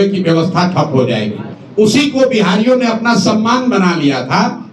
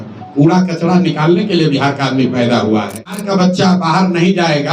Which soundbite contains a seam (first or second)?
second